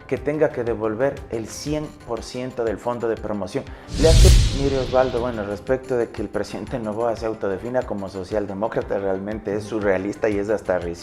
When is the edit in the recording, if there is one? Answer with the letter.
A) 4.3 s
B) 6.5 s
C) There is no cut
A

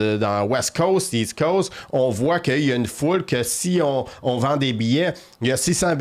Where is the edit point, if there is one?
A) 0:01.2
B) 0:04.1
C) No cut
C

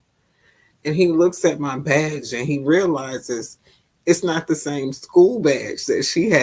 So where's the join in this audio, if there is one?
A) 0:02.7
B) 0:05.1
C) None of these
C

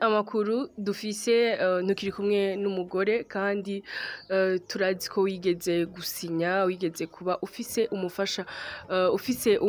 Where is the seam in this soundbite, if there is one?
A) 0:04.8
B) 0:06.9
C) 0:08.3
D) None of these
D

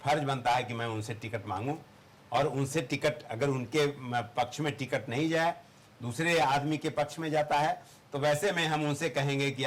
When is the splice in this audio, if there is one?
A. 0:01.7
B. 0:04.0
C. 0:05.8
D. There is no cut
D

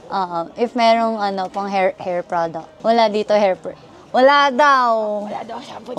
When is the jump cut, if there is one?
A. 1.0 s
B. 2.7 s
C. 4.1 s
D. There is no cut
B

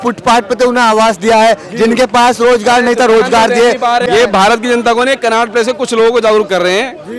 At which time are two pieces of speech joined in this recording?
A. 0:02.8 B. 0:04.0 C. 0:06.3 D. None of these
B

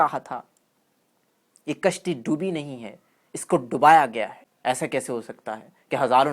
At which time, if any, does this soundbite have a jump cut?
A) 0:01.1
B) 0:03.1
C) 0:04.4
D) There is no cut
C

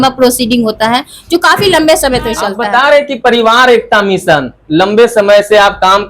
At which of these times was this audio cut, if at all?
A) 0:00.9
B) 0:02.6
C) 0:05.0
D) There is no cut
B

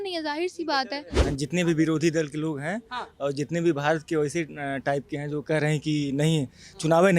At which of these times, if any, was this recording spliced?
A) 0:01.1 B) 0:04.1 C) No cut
A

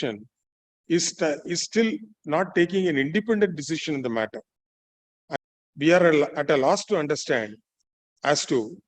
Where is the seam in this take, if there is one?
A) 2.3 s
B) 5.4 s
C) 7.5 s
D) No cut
B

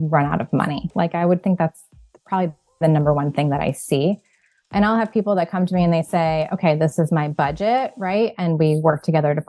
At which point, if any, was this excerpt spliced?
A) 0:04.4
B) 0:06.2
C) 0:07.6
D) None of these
D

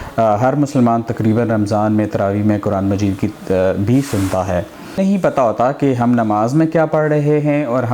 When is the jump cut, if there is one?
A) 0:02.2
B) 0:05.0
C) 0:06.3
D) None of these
B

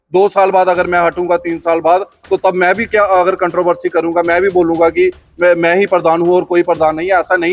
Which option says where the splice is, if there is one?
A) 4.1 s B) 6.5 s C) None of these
C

